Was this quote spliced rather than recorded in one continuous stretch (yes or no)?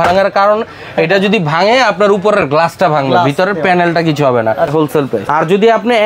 yes